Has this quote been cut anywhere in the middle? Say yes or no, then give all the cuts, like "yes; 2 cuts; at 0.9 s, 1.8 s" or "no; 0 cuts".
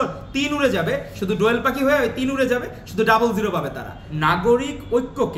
yes; 1 cut; at 4.0 s